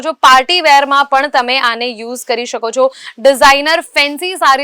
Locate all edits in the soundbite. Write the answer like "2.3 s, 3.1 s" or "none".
none